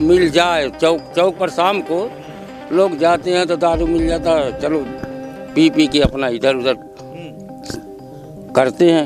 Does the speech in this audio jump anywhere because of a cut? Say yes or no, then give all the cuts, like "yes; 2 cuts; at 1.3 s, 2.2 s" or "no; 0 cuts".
no; 0 cuts